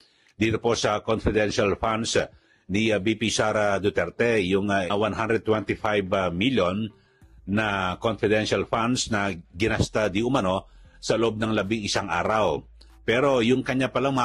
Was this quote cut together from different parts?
yes; 1 cut; at 4.9 s

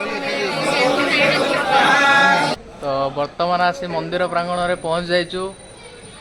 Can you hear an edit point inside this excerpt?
yes; 1 cut; at 2.6 s

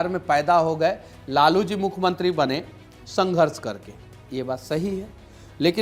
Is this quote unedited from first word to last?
yes; 0 cuts

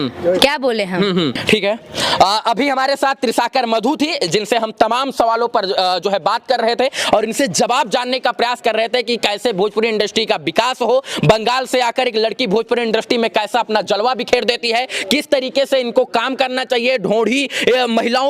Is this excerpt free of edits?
yes; 0 cuts

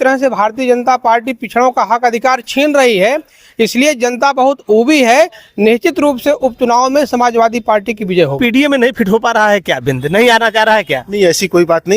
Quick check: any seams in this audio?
yes; 1 cut; at 8.4 s

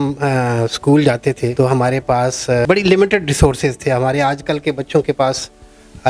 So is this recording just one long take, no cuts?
no; 2 cuts; at 1.5 s, 2.7 s

